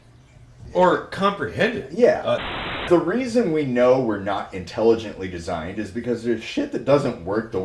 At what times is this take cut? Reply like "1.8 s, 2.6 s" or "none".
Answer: 2.9 s